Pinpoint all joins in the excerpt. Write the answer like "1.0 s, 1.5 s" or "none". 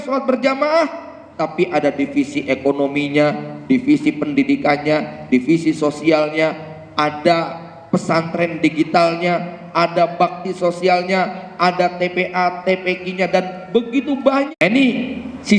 14.5 s